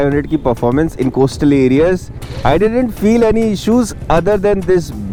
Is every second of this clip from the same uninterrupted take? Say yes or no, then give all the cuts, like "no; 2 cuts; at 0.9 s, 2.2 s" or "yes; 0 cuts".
yes; 0 cuts